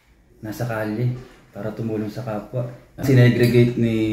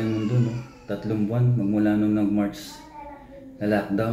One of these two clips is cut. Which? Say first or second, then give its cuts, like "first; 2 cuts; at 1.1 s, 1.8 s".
first; 1 cut; at 3.0 s